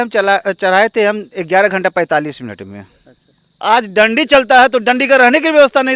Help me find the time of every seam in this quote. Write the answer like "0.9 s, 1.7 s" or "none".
3.5 s

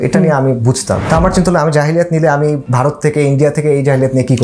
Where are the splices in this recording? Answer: 1.0 s, 2.6 s

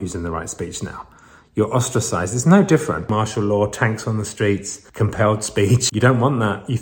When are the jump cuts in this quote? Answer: 3.1 s, 4.8 s, 5.9 s

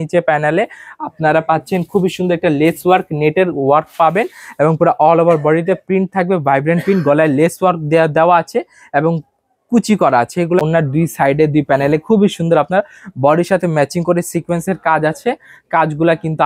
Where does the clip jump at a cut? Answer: 10.6 s

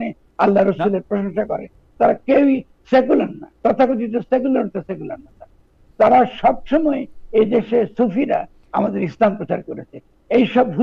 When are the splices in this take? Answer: none

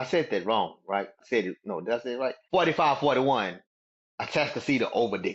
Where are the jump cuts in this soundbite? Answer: 1.2 s, 2.4 s

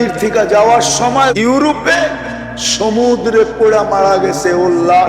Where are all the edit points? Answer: 1.3 s

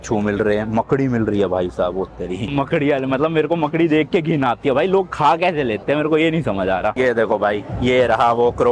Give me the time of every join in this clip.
2.5 s, 6.9 s

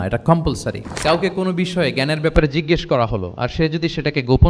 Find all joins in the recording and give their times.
0.9 s

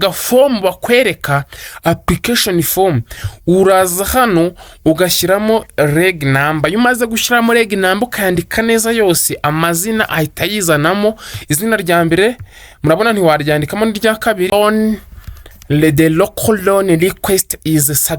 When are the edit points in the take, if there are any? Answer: 14.5 s

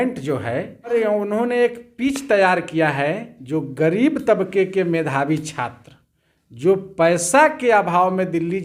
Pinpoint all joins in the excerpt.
0.9 s

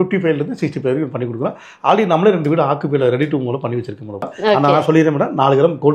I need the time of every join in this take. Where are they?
4.2 s

